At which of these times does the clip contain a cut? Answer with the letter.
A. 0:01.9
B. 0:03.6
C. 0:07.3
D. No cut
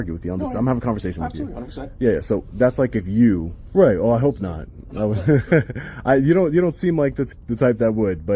B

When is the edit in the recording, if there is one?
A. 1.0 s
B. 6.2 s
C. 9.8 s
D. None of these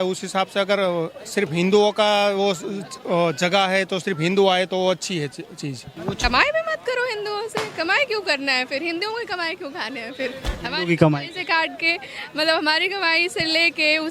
B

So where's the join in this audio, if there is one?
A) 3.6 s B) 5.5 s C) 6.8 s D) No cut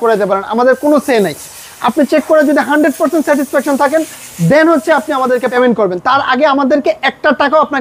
B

